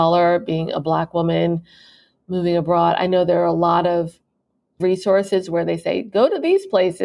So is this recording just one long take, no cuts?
no; 1 cut; at 4.8 s

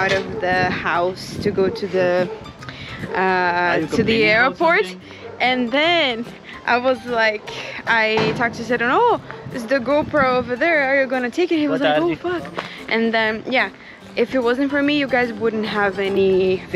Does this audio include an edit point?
no; 0 cuts

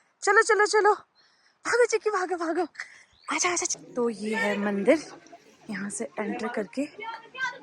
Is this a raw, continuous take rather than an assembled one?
no; 1 cut; at 3.7 s

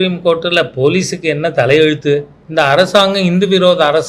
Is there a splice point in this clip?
yes; 1 cut; at 2.4 s

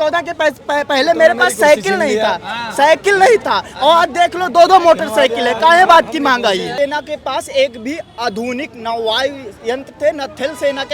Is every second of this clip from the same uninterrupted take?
no; 1 cut; at 6.7 s

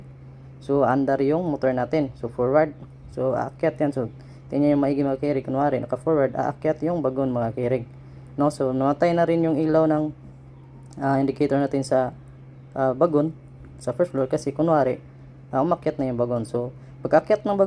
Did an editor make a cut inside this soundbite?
no; 0 cuts

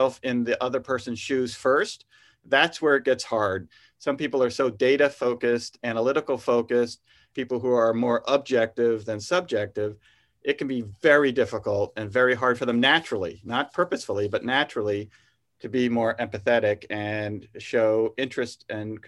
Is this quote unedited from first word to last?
no; 2 cuts; at 3.7 s, 7.3 s

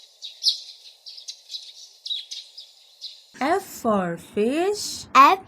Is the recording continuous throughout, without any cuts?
no; 1 cut; at 2.2 s

